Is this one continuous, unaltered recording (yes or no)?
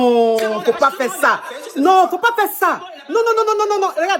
yes